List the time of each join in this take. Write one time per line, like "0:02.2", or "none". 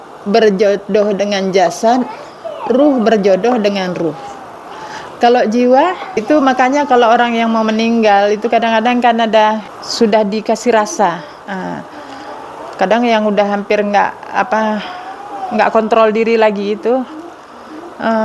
0:06.2
0:09.8